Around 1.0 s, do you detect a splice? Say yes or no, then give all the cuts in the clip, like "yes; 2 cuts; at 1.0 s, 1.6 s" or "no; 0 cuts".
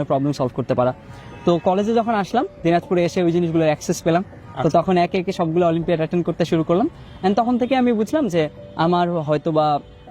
no; 0 cuts